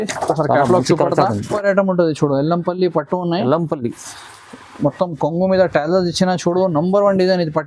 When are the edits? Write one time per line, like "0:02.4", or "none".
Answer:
0:01.4